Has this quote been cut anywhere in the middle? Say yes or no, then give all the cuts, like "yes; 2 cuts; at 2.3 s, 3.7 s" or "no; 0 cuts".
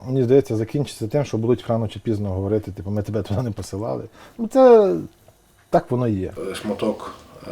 yes; 1 cut; at 6.3 s